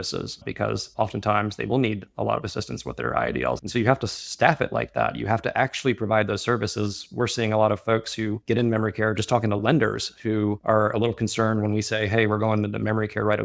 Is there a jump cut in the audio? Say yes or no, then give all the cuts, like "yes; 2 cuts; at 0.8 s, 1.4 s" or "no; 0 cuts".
no; 0 cuts